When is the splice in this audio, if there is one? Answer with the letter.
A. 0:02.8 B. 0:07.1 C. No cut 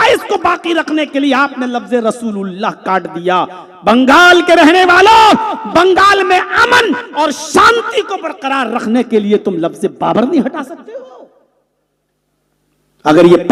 C